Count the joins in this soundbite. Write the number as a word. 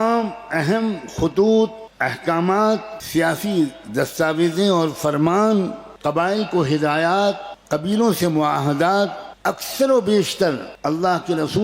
six